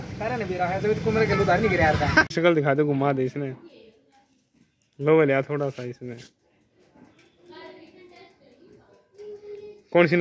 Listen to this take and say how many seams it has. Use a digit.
1